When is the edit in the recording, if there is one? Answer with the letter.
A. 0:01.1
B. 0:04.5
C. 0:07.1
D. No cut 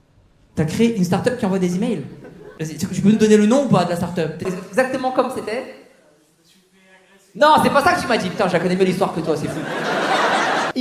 B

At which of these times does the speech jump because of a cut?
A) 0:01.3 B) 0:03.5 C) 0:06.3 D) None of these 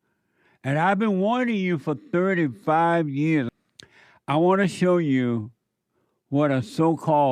B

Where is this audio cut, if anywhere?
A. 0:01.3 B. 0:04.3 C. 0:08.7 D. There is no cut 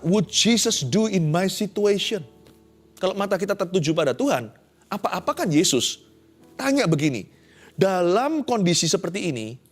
A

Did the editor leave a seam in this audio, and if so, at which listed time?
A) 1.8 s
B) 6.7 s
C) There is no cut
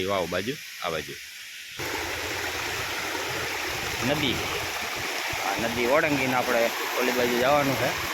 A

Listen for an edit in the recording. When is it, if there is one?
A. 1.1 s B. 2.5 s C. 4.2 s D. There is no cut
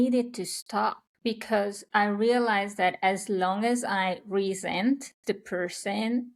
A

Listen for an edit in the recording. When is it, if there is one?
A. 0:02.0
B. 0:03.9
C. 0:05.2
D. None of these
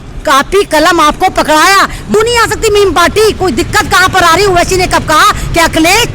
A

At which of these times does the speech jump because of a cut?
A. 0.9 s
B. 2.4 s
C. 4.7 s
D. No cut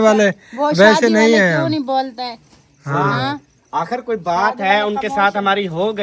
D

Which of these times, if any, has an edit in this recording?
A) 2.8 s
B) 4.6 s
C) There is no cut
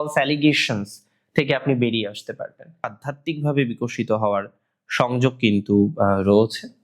A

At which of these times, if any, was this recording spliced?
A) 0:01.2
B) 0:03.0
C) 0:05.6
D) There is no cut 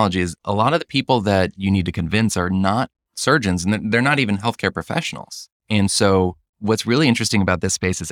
B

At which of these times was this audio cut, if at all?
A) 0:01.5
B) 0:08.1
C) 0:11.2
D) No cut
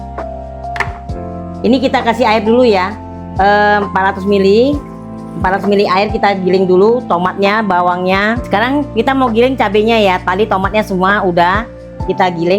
A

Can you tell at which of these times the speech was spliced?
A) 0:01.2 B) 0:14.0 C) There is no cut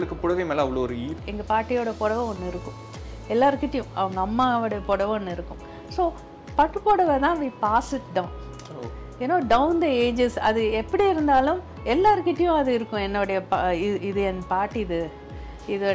A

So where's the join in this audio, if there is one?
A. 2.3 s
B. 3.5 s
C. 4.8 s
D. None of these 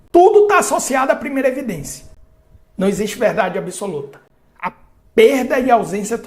D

